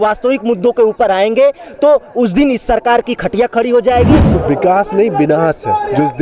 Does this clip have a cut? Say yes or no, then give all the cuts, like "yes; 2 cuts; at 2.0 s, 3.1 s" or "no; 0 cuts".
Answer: yes; 1 cut; at 4.3 s